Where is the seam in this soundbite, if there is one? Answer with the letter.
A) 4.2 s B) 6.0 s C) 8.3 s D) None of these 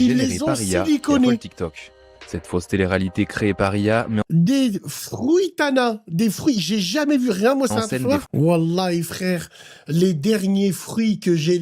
C